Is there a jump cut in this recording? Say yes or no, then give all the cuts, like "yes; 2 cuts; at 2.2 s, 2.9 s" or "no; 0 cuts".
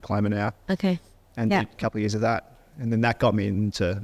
no; 0 cuts